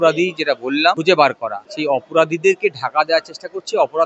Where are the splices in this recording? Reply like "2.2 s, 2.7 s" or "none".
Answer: 1.0 s, 1.6 s